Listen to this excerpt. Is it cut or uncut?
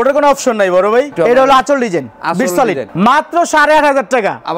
cut